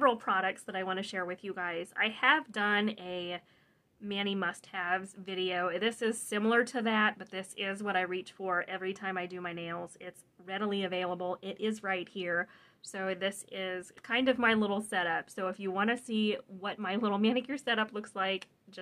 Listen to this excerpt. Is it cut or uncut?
uncut